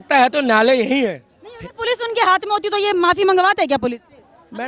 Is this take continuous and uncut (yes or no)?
yes